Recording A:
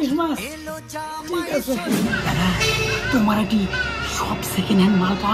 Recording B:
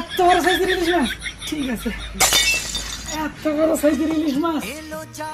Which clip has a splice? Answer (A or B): A